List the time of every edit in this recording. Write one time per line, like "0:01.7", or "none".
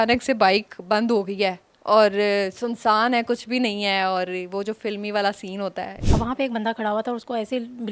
0:06.0